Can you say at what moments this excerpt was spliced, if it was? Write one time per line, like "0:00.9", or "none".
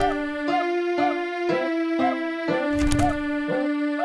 0:01.4
0:02.5